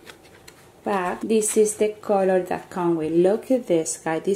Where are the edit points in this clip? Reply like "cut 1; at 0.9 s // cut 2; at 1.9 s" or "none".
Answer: cut 1; at 1.2 s